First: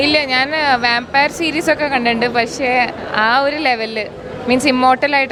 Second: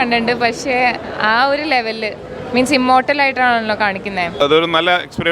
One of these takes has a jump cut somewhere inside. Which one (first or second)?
second